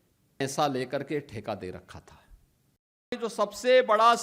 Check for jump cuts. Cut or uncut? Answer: cut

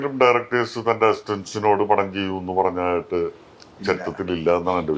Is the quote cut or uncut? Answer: uncut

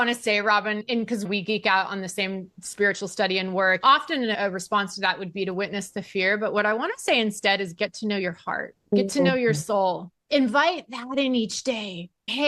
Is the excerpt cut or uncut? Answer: uncut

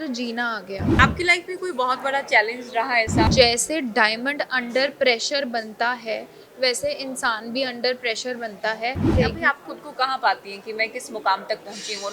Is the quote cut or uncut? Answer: cut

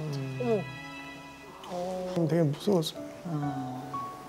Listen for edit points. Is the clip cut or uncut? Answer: uncut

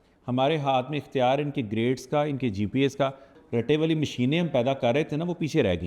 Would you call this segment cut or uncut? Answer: cut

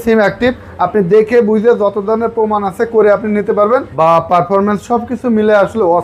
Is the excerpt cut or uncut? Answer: cut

